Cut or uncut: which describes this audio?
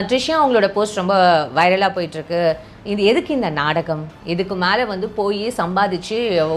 uncut